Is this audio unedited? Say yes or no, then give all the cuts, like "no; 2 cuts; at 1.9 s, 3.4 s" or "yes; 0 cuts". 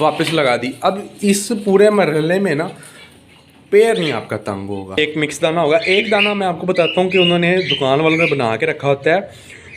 no; 1 cut; at 5.0 s